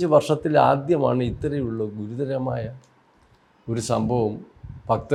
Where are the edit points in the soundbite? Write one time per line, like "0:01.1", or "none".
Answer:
none